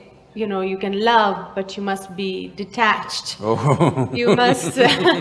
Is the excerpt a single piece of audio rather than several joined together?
yes; 0 cuts

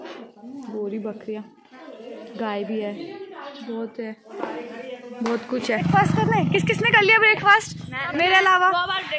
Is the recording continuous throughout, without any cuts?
no; 1 cut; at 5.8 s

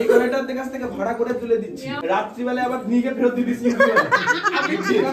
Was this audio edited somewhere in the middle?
yes; 1 cut; at 2.0 s

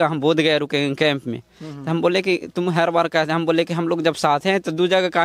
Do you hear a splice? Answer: no; 0 cuts

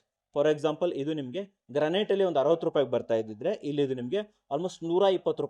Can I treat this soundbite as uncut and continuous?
yes; 0 cuts

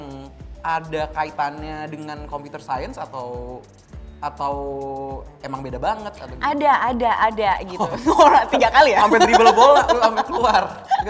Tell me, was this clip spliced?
no; 0 cuts

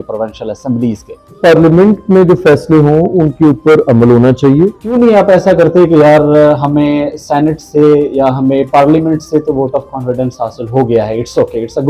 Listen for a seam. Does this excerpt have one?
yes; 2 cuts; at 1.4 s, 4.8 s

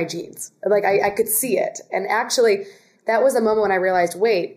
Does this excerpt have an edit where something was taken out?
no; 0 cuts

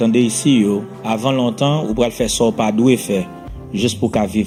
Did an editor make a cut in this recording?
no; 0 cuts

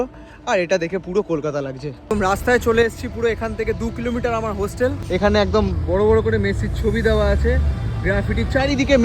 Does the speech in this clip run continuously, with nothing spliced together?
no; 2 cuts; at 2.1 s, 5.0 s

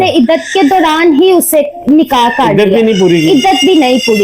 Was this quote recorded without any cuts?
yes; 0 cuts

